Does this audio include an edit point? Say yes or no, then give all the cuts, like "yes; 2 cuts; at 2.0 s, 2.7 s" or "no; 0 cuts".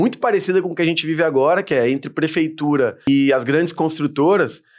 yes; 1 cut; at 3.0 s